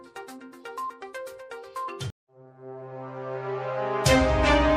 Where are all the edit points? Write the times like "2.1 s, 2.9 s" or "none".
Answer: none